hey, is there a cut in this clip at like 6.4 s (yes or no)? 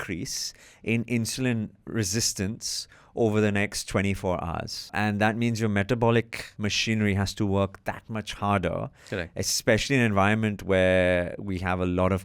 yes